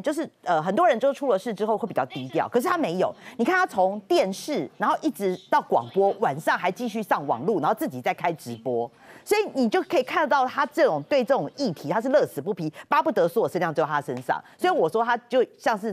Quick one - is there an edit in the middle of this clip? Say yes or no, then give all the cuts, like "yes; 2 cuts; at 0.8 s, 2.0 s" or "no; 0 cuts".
no; 0 cuts